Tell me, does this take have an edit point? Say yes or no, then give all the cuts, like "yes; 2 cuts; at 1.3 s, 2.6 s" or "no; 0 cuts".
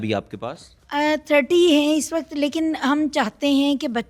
no; 0 cuts